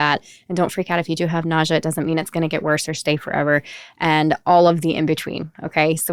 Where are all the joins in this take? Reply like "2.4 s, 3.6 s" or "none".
none